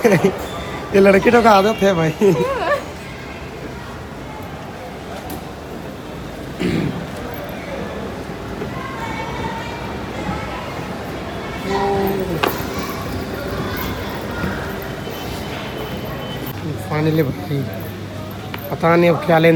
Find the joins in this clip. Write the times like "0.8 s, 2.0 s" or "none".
none